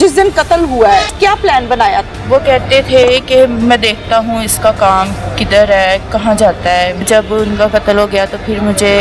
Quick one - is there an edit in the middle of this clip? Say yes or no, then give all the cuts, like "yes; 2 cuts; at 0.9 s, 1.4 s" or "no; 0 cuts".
no; 0 cuts